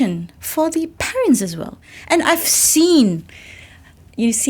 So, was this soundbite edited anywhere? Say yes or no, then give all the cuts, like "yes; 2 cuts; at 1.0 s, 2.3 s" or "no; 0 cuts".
yes; 1 cut; at 1.9 s